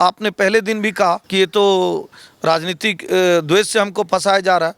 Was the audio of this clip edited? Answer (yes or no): yes